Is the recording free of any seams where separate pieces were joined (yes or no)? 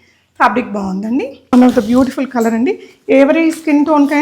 no